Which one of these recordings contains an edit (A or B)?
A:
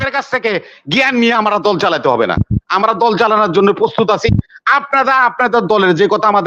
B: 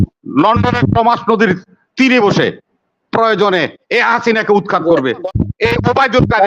B